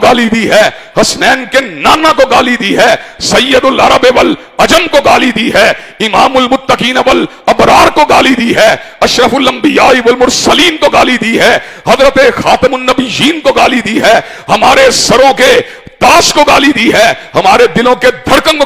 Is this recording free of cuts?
yes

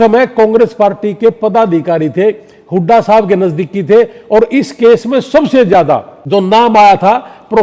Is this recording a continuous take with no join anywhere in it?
no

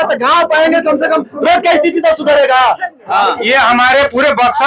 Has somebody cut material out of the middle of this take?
yes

